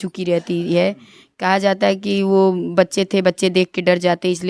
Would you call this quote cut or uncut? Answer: uncut